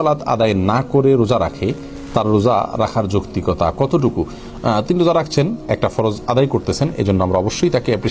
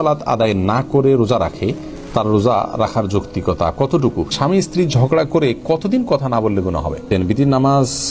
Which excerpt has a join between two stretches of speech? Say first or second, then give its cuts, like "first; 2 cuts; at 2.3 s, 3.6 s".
second; 2 cuts; at 4.3 s, 7.1 s